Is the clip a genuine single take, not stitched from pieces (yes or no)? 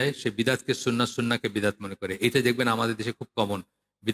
yes